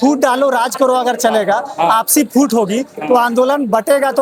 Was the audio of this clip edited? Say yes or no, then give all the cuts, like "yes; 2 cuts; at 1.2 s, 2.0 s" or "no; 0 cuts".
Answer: no; 0 cuts